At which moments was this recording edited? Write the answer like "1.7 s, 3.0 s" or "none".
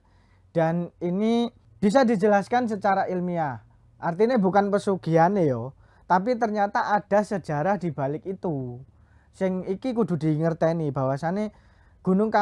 1.6 s